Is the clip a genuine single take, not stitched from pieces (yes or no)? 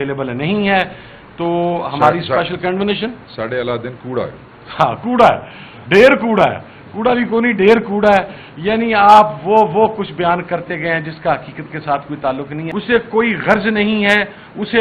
no